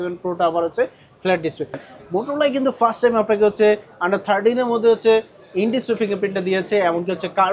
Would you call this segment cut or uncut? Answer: cut